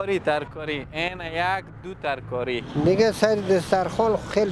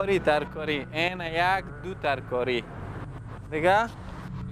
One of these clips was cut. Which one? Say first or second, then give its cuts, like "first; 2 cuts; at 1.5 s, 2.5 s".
first; 1 cut; at 2.7 s